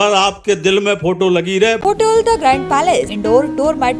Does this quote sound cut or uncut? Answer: cut